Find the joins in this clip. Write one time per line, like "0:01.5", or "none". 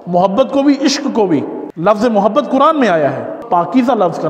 0:01.6
0:03.4